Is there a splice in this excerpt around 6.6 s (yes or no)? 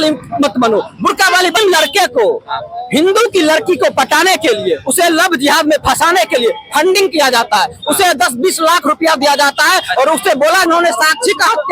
no